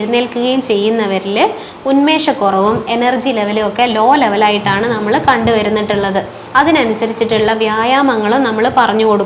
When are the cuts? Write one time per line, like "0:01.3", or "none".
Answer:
0:06.4